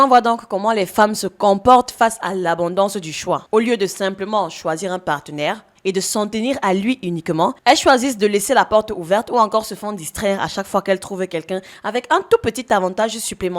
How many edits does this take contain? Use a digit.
1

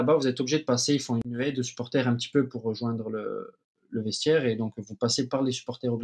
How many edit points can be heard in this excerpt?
1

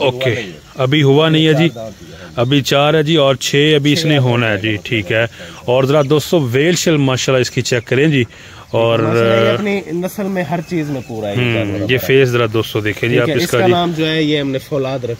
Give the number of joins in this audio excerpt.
0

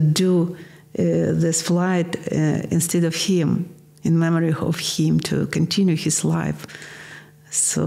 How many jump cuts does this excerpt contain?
0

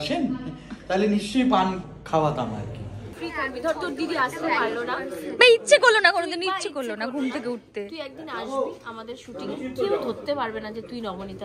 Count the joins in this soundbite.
1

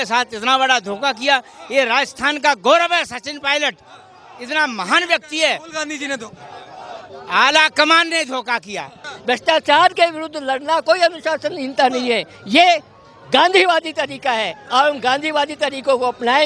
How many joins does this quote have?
1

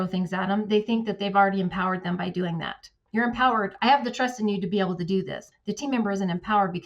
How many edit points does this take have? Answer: 2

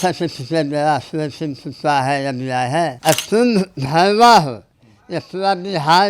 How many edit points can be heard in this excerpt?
1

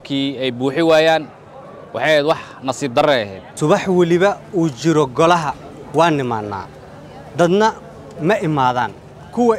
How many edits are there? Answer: 1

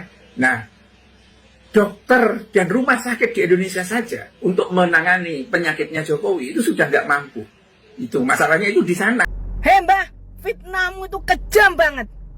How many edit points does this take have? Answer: 1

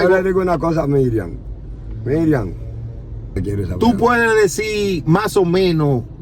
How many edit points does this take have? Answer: 1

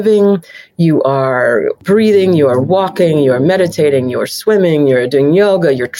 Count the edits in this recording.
1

